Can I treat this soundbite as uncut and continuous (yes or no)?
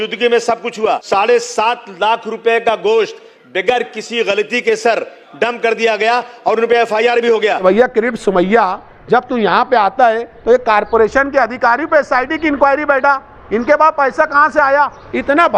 no